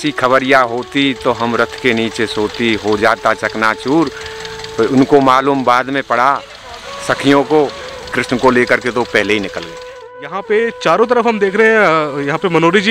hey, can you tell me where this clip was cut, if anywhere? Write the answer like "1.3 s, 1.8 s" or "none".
8.1 s, 10.1 s